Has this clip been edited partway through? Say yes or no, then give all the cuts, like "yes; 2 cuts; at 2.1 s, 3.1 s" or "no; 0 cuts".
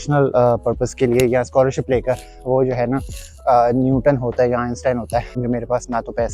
yes; 1 cut; at 5.3 s